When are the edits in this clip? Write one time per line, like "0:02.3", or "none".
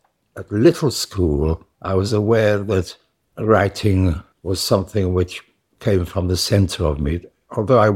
0:01.7
0:04.3